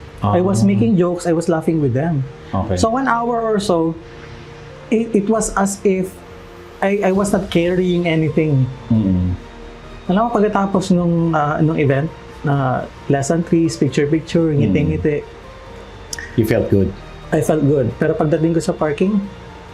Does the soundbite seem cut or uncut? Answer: uncut